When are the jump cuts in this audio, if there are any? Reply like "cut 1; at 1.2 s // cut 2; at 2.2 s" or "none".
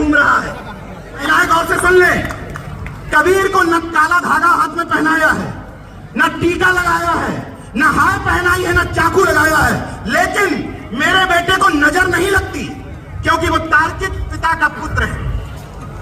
cut 1; at 1.2 s